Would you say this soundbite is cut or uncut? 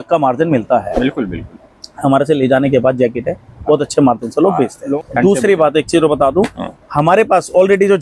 cut